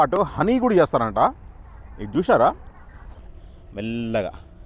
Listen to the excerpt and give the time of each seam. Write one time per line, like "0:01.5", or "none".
0:03.2